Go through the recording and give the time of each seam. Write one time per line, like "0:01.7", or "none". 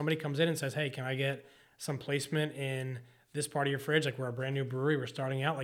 none

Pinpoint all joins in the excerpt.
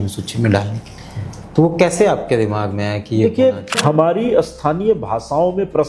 0:03.8

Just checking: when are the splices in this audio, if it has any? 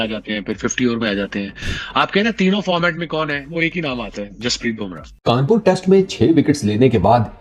0:05.1

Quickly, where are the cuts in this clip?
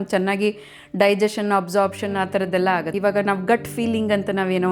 0:02.9

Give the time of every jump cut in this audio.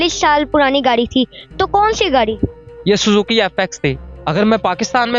0:04.1

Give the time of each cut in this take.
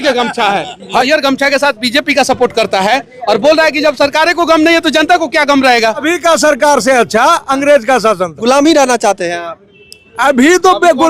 0:01.0
0:06.0
0:08.4

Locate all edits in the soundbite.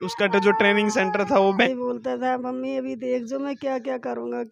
0:01.7

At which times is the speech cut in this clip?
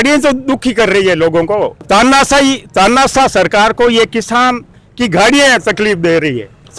none

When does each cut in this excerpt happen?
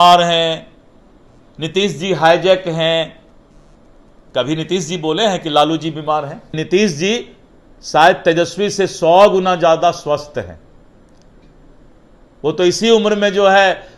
0:06.5

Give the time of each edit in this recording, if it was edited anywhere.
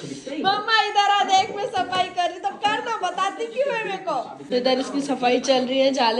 0:04.4

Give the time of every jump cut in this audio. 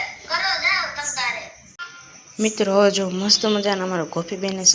0:02.0

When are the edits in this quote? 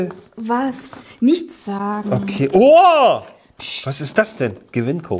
none

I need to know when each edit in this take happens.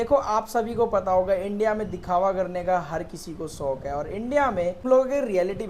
0:04.8

